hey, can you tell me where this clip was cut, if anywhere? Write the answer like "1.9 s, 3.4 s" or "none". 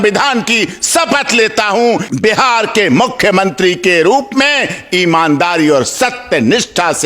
2.1 s